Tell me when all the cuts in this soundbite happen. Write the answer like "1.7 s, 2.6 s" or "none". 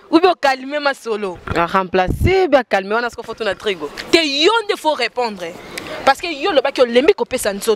none